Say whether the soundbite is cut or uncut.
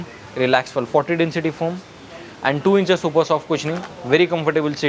uncut